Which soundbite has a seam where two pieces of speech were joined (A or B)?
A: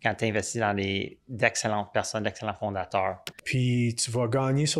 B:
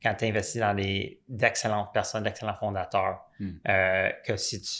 A